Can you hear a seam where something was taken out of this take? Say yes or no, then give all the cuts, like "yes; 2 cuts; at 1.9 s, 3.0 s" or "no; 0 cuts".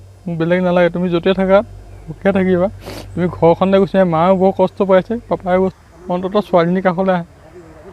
yes; 1 cut; at 5.8 s